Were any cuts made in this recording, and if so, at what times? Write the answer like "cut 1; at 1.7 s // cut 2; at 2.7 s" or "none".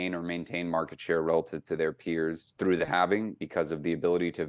cut 1; at 2.5 s // cut 2; at 3.4 s